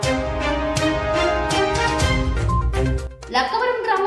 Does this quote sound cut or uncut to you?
cut